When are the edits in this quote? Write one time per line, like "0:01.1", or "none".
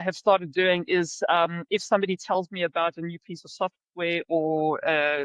none